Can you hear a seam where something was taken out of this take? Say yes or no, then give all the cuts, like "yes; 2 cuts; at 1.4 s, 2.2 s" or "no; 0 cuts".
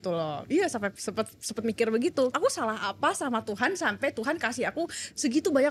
yes; 1 cut; at 2.3 s